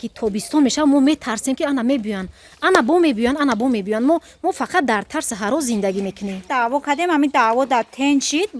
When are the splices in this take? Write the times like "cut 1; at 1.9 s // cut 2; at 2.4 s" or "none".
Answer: cut 1; at 6.5 s